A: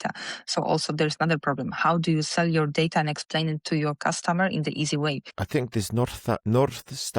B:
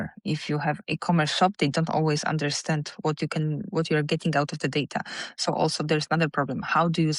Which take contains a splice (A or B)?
A